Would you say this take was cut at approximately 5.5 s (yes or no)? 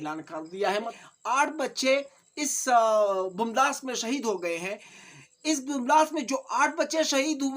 no